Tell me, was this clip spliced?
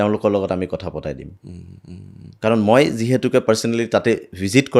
no; 0 cuts

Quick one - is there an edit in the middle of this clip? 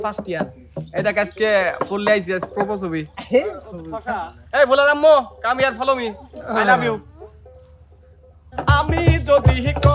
yes; 1 cut; at 8.5 s

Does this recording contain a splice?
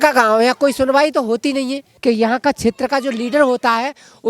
yes; 1 cut; at 1.9 s

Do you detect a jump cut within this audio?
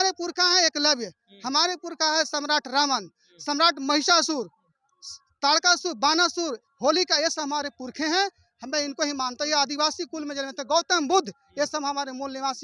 no; 0 cuts

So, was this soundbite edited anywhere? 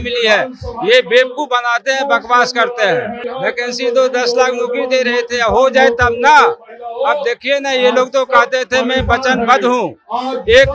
yes; 1 cut; at 3.2 s

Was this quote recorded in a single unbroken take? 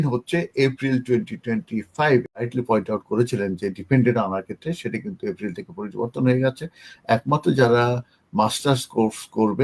no; 1 cut; at 2.5 s

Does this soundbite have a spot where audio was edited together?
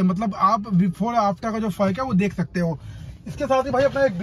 no; 0 cuts

